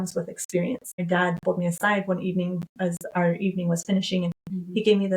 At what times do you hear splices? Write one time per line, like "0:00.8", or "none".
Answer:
0:01.0